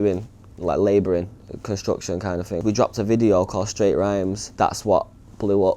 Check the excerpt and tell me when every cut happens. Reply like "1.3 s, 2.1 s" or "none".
2.6 s, 4.5 s